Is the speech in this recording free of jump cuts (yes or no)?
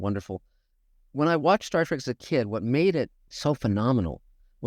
no